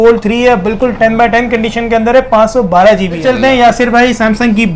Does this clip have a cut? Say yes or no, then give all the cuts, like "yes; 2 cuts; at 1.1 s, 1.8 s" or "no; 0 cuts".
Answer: yes; 1 cut; at 3.2 s